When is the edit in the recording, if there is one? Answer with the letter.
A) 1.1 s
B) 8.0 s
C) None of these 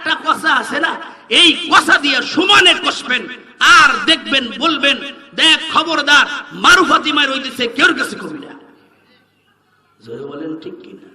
C